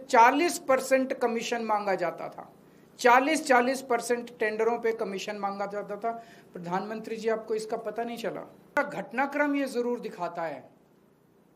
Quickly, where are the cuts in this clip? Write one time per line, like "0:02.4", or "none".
0:08.8